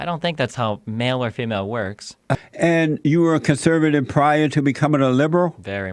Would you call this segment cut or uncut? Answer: cut